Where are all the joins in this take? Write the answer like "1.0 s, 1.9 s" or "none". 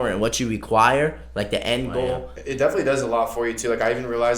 2.3 s